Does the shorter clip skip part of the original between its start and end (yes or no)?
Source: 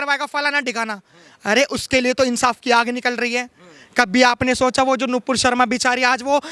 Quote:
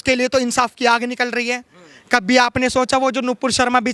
no